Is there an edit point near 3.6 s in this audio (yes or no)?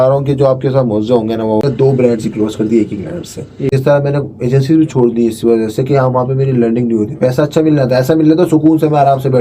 yes